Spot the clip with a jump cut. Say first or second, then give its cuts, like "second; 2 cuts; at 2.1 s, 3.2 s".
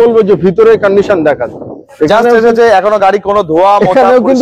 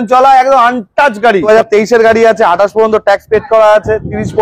second; 1 cut; at 1.5 s